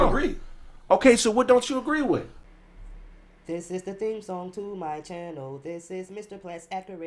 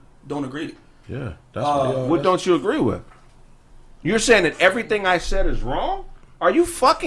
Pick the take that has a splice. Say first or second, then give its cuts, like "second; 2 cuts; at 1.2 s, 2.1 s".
first; 1 cut; at 2.4 s